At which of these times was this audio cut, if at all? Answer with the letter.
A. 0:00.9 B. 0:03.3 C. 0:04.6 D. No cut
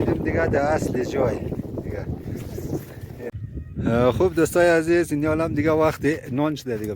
B